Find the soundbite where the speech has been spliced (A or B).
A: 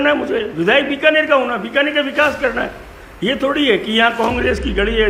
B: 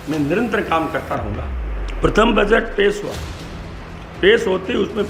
B